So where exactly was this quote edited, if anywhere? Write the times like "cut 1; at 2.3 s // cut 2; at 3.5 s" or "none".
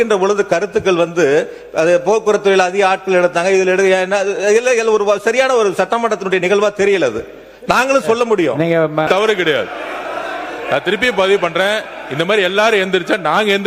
cut 1; at 9.1 s